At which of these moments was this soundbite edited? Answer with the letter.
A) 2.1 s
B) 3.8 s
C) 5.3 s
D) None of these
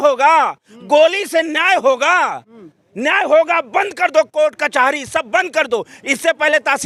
D